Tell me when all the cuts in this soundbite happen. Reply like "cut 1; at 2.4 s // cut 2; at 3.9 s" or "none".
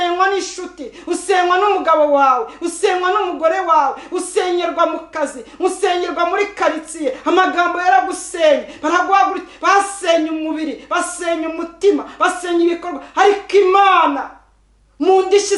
none